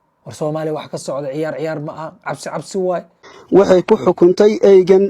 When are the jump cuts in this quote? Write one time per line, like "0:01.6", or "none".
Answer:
0:03.3